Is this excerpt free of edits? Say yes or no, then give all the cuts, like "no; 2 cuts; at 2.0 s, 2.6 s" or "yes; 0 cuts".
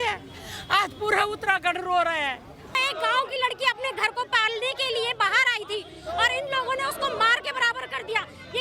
no; 1 cut; at 2.8 s